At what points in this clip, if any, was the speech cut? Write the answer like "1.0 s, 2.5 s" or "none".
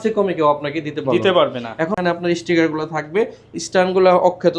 2.0 s